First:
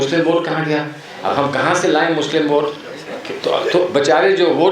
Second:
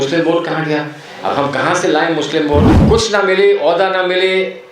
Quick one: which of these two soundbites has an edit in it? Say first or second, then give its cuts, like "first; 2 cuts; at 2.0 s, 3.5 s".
second; 1 cut; at 2.8 s